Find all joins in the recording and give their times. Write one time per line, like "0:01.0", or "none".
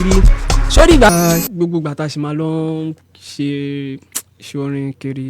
0:01.1